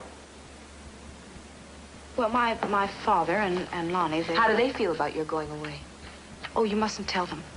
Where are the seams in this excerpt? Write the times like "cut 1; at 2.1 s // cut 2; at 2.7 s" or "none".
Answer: cut 1; at 2.6 s